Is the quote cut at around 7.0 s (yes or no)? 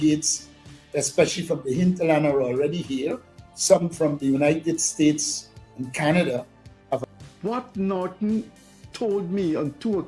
yes